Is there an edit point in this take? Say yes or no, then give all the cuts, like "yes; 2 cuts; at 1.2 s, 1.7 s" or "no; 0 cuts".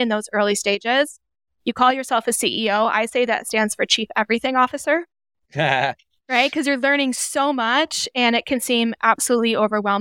no; 0 cuts